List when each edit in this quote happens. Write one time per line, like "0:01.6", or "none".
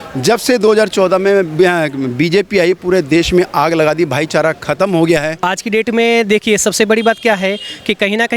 0:05.5

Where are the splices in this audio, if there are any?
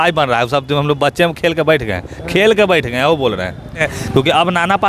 0:04.0

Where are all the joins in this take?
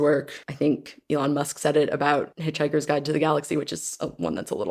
0:00.8
0:02.4

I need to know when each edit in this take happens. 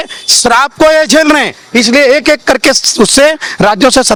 none

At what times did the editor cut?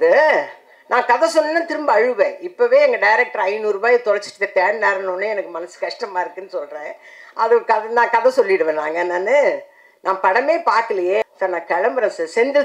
0:11.2

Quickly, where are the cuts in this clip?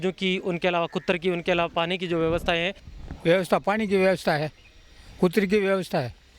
0:02.9

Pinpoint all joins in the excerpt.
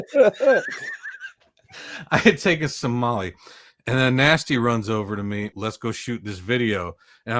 0:05.5

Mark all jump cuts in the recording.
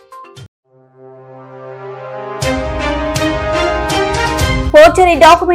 none

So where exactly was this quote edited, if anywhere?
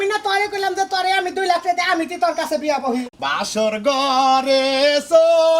0:03.2

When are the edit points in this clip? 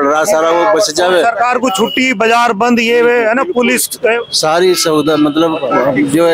none

